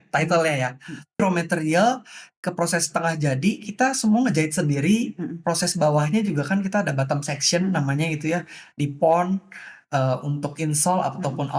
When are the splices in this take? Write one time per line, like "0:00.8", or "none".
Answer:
0:01.2